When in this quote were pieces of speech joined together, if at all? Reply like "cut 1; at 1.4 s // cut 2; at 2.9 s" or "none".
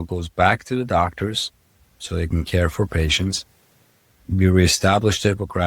none